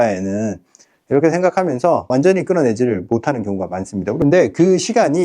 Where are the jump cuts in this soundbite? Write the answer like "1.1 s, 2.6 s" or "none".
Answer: 4.2 s